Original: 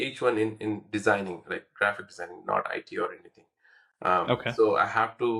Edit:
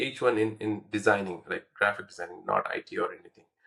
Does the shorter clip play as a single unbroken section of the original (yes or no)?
yes